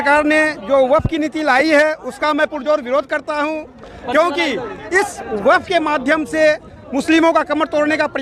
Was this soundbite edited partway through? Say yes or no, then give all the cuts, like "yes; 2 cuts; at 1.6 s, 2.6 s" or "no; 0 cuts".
no; 0 cuts